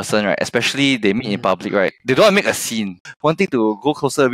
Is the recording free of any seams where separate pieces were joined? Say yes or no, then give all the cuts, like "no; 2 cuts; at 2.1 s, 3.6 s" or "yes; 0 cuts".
no; 2 cuts; at 2.0 s, 3.1 s